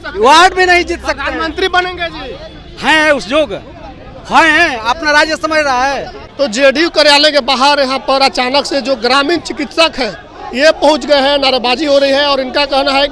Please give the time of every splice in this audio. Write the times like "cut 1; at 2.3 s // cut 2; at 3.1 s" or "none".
cut 1; at 6.2 s